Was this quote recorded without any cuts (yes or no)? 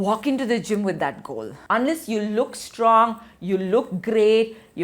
no